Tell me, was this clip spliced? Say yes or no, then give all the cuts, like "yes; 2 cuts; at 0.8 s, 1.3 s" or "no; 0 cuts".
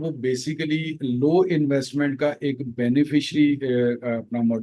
no; 0 cuts